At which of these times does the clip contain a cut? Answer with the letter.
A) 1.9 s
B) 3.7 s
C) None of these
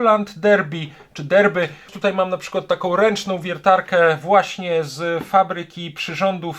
A